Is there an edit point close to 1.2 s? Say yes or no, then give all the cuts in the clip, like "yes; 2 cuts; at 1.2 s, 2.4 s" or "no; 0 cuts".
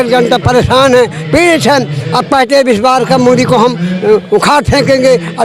no; 0 cuts